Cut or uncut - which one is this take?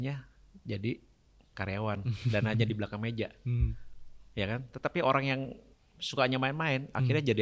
uncut